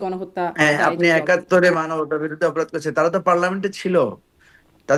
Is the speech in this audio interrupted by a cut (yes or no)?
no